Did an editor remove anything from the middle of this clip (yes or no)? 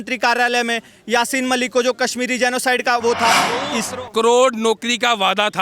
yes